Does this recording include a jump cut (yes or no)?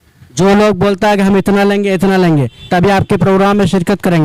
no